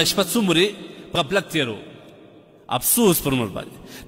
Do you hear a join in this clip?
yes; 1 cut; at 1.1 s

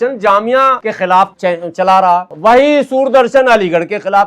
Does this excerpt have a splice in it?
yes; 2 cuts; at 1.2 s, 2.3 s

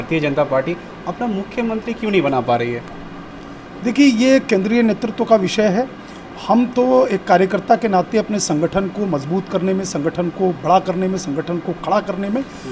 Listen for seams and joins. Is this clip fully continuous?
yes; 0 cuts

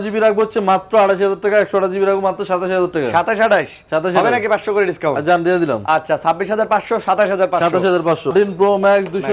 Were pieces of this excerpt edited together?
yes; 1 cut; at 8.3 s

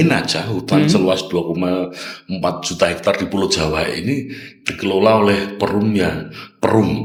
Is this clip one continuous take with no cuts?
yes; 0 cuts

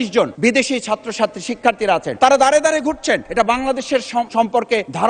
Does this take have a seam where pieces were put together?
no; 0 cuts

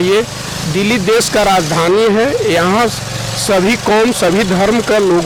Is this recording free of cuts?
yes; 0 cuts

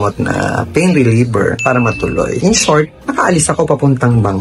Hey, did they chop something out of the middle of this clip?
yes; 1 cut; at 2.4 s

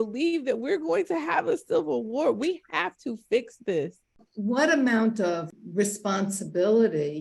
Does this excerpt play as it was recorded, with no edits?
no; 2 cuts; at 4.2 s, 5.6 s

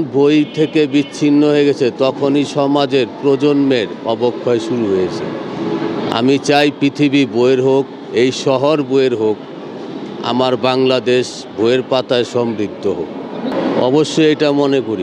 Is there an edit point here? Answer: no; 0 cuts

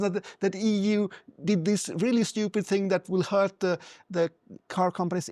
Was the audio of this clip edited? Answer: no; 0 cuts

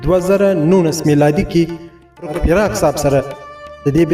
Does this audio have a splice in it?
yes; 1 cut; at 2.3 s

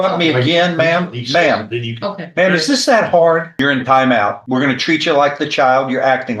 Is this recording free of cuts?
no; 2 cuts; at 3.5 s, 4.4 s

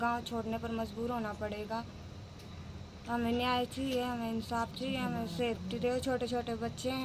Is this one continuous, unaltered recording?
yes; 0 cuts

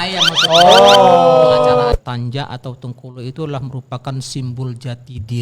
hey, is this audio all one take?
no; 1 cut; at 1.9 s

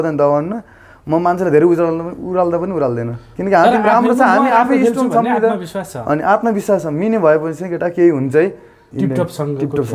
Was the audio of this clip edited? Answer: yes; 1 cut; at 8.8 s

